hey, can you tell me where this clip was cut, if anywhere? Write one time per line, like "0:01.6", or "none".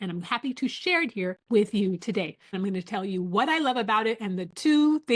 0:01.4
0:02.5